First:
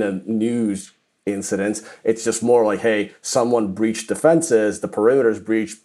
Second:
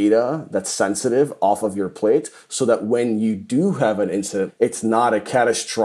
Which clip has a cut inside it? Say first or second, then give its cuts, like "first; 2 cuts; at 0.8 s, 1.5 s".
second; 1 cut; at 4.5 s